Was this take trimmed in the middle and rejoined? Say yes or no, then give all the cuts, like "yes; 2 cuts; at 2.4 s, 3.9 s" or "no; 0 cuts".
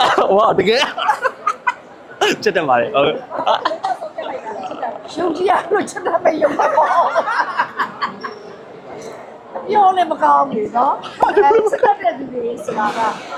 no; 0 cuts